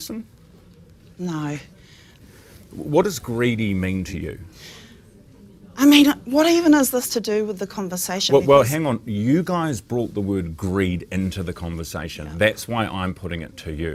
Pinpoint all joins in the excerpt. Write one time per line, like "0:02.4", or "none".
none